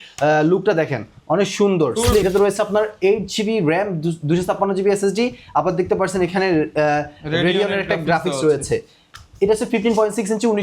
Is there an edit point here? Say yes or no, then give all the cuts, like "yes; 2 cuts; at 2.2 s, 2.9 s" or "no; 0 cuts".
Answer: yes; 1 cut; at 2.2 s